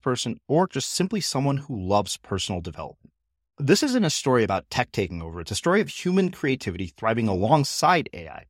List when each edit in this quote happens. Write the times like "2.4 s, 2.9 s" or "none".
none